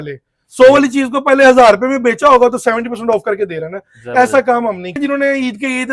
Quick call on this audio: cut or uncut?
cut